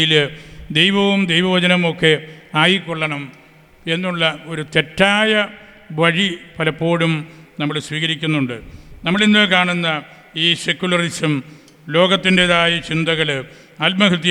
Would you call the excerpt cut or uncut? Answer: uncut